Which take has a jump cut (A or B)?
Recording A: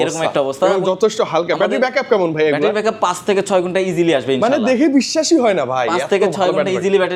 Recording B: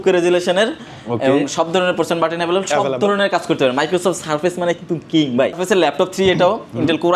B